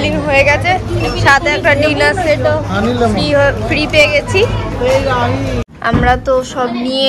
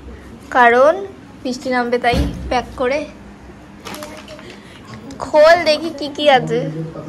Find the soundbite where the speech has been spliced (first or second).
first